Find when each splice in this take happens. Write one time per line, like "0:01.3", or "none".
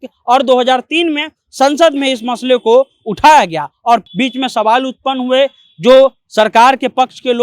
0:04.1